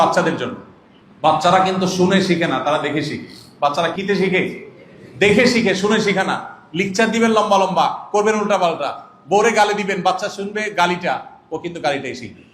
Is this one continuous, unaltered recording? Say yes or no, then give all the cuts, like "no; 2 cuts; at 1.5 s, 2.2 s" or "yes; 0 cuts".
no; 1 cut; at 3.9 s